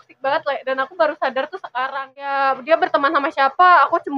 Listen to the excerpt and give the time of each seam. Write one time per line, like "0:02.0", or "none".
0:02.3